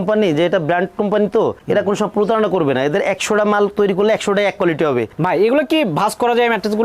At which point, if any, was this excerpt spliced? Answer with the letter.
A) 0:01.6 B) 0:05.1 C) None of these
B